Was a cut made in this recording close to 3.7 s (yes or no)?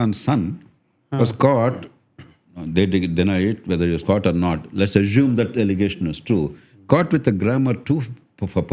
no